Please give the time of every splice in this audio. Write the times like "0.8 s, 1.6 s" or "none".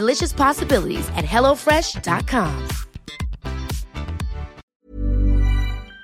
4.6 s